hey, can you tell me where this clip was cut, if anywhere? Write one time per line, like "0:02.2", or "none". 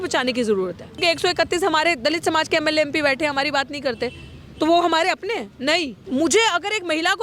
0:01.0
0:06.0